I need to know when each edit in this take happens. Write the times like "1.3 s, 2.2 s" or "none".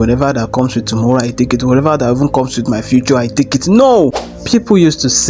4.3 s